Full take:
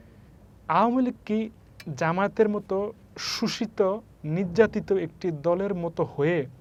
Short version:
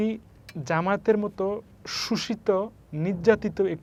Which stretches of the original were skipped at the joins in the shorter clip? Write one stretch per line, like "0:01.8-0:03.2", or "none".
none